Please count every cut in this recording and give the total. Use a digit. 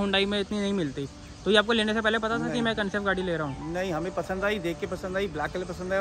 0